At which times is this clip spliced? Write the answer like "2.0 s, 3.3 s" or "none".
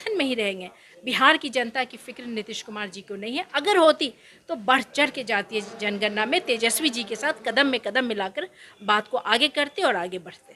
none